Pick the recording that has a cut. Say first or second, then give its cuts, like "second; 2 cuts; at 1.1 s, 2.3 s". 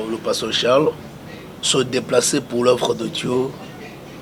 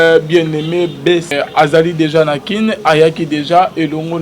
second; 1 cut; at 1.3 s